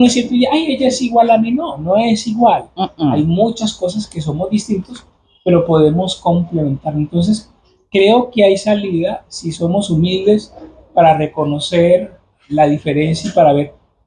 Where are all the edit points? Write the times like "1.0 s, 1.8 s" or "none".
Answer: none